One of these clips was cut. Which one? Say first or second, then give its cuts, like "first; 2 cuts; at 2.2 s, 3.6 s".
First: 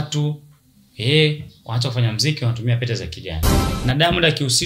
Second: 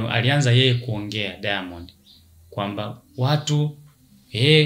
first; 1 cut; at 3.6 s